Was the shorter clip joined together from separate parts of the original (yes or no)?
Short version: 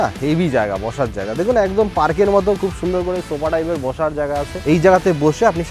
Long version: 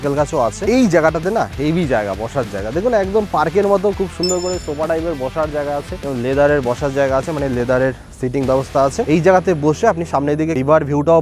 yes